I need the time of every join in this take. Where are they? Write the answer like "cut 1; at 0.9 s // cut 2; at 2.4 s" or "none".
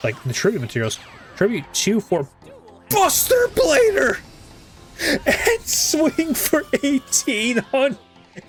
none

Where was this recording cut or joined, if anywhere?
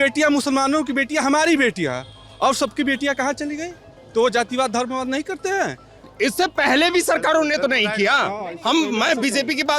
cut 1; at 5.9 s

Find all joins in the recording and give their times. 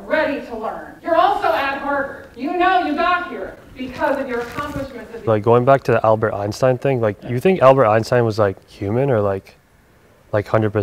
cut 1; at 0.9 s // cut 2; at 2.2 s // cut 3; at 5.2 s

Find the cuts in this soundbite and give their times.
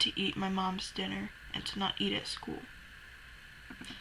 none

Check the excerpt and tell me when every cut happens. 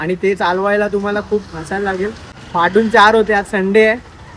cut 1; at 2.3 s

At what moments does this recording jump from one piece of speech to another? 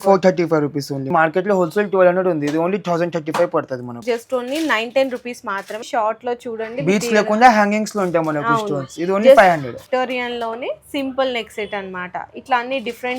cut 1; at 1.1 s // cut 2; at 4.0 s // cut 3; at 5.8 s // cut 4; at 9.8 s

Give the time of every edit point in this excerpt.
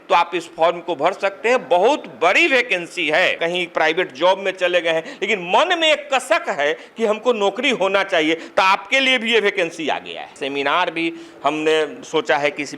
cut 1; at 3.4 s // cut 2; at 10.4 s

